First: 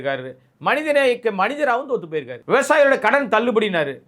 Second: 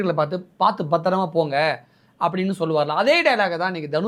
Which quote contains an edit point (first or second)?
first